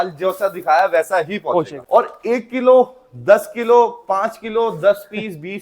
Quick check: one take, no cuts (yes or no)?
no